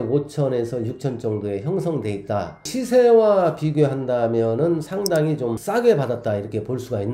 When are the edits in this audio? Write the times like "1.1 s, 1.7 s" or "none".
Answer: 2.6 s, 5.1 s

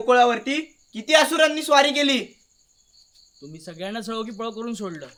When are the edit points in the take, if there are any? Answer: none

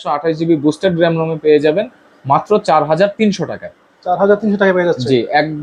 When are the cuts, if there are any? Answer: none

